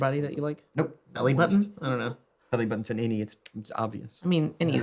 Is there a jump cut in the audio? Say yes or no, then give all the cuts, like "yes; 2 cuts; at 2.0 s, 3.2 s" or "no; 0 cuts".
yes; 1 cut; at 1.0 s